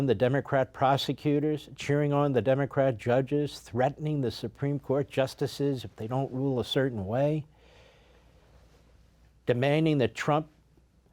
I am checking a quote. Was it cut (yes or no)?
no